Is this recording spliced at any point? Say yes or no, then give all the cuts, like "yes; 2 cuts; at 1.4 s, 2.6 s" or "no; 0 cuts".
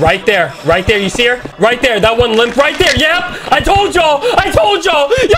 yes; 1 cut; at 1.5 s